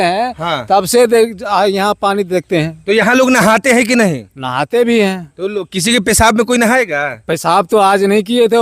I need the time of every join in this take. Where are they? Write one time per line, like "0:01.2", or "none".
none